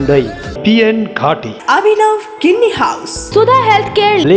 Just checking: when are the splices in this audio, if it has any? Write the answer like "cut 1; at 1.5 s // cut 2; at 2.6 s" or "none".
cut 1; at 3.1 s